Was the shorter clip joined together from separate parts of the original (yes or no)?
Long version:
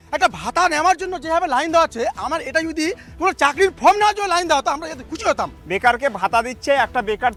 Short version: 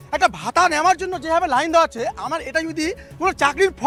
no